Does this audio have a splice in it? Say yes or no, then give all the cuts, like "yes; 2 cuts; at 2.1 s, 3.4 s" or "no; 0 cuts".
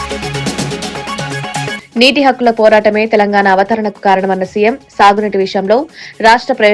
yes; 1 cut; at 1.7 s